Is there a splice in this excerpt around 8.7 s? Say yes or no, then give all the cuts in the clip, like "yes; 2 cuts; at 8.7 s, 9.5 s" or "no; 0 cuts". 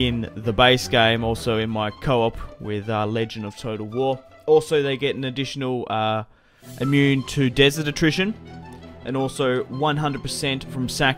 no; 1 cut; at 10.0 s